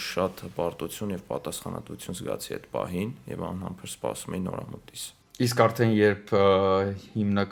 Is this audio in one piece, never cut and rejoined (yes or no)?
yes